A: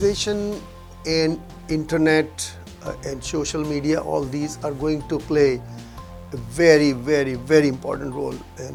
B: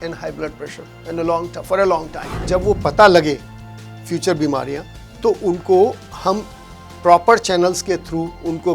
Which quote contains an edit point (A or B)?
B